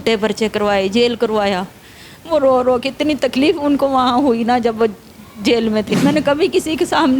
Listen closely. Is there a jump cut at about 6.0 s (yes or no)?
yes